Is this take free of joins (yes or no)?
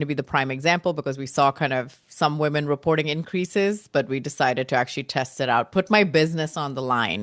yes